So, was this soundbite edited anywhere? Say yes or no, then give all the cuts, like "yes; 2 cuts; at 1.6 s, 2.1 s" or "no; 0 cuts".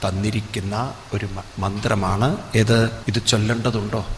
yes; 1 cut; at 3.0 s